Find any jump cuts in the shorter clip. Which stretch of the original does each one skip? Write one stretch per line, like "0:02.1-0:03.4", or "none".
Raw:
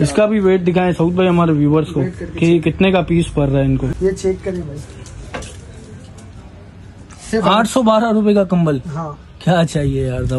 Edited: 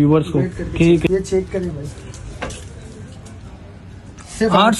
0:02.7-0:04.0